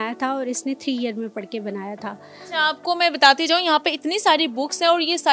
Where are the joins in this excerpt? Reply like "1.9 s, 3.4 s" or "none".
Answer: none